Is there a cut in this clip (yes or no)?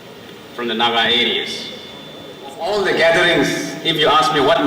yes